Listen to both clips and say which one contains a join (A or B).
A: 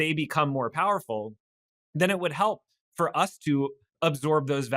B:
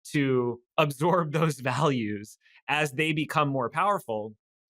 A